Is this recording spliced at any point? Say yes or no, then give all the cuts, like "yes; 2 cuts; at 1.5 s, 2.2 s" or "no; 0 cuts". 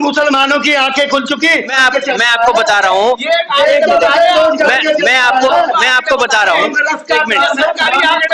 yes; 1 cut; at 1.8 s